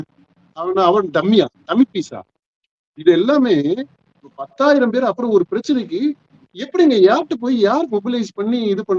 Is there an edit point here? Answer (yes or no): no